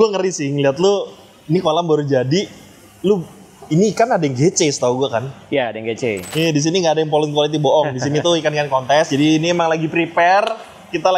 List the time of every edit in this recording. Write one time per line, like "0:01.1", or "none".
0:06.2